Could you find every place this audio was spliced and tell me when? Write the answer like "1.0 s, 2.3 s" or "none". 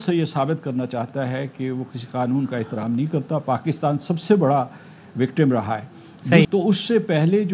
6.5 s